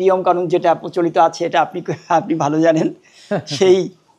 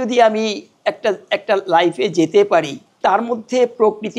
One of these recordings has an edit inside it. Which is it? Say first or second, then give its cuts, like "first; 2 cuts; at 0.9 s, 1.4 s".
second; 1 cut; at 2.8 s